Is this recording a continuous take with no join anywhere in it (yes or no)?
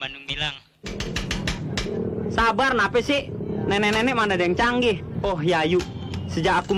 no